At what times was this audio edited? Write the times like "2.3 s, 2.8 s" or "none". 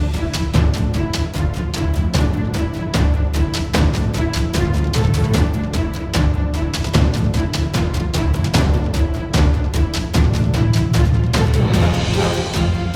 none

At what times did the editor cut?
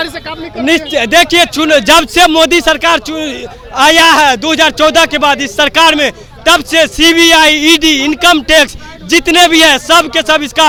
none

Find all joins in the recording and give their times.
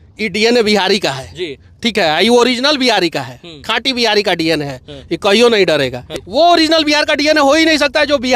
6.1 s

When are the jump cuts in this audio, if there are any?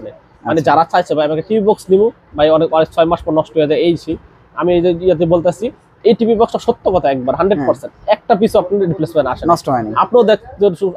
none

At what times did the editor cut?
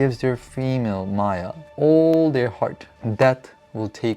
1.6 s, 2.9 s

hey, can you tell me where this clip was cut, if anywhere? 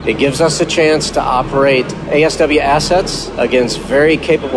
2.0 s, 3.2 s

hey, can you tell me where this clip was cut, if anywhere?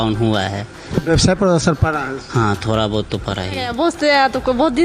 3.7 s

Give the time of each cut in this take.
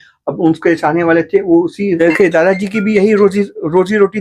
1.9 s

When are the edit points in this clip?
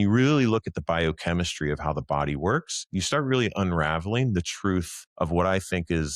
5.0 s

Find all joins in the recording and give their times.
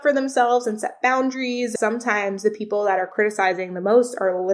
1.7 s

